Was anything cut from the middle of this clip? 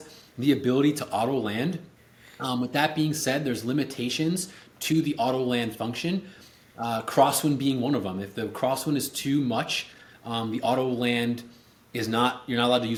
no; 0 cuts

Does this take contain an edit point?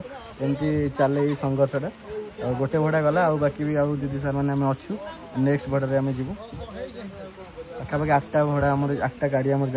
no; 0 cuts

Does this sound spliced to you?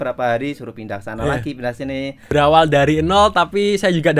yes; 1 cut; at 2.2 s

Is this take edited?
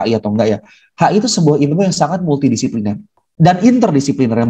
yes; 1 cut; at 3.2 s

